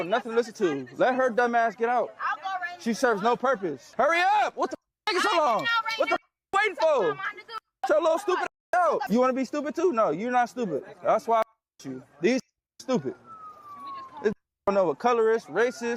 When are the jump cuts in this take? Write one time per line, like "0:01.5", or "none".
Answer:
0:03.8
0:09.1